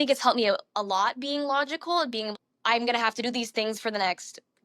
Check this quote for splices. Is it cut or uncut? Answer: cut